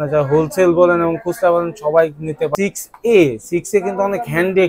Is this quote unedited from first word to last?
no; 1 cut; at 2.5 s

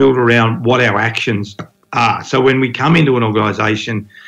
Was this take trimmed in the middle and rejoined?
no; 0 cuts

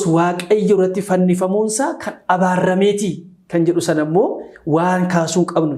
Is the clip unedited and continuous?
yes; 0 cuts

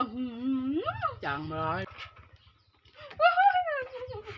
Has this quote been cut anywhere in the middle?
yes; 1 cut; at 1.9 s

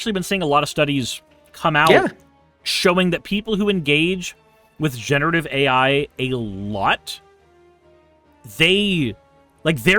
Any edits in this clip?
no; 0 cuts

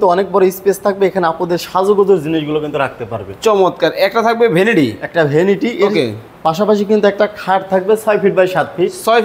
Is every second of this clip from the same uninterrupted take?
yes; 0 cuts

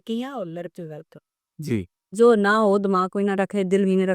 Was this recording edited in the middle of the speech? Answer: yes; 1 cut; at 2.2 s

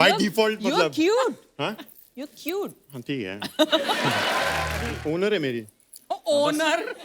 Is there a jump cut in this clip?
yes; 1 cut; at 4.8 s

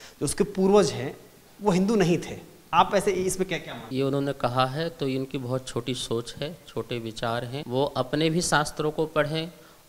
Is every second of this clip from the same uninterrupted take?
no; 2 cuts; at 3.8 s, 7.6 s

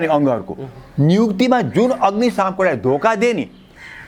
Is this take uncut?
yes; 0 cuts

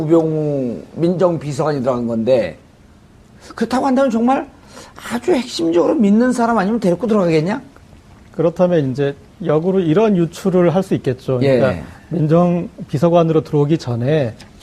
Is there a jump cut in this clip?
yes; 1 cut; at 7.5 s

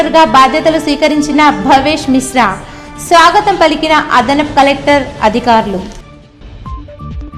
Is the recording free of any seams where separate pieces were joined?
yes; 0 cuts

